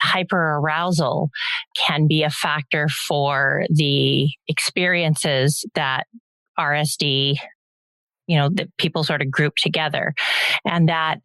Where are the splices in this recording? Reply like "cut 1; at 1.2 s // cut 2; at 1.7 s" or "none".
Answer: cut 1; at 1.7 s